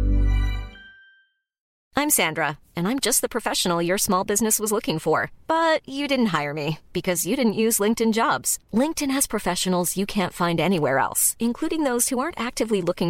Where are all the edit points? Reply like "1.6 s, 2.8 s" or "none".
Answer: 1.7 s